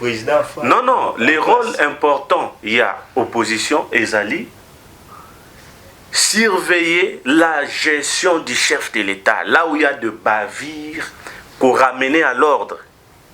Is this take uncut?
yes; 0 cuts

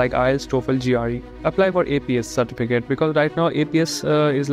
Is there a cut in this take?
yes; 1 cut; at 1.3 s

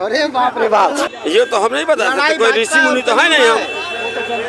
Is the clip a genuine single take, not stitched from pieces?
no; 1 cut; at 1.0 s

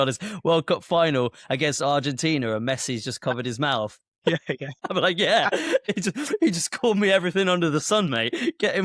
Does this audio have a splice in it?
no; 0 cuts

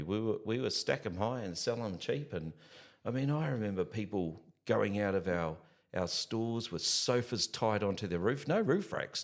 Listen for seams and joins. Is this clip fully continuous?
yes; 0 cuts

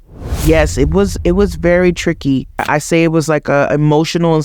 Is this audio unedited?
no; 1 cut; at 2.6 s

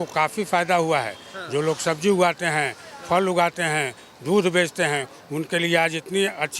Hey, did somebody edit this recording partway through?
no; 0 cuts

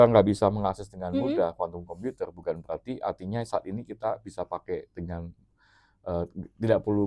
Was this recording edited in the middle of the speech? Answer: no; 0 cuts

